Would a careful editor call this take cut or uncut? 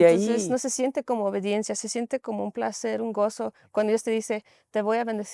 uncut